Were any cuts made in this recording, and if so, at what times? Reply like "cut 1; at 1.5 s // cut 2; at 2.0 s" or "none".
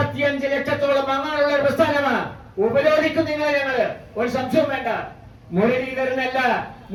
none